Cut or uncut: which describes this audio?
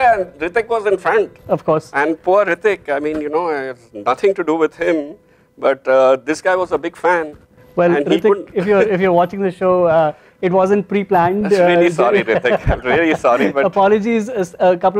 uncut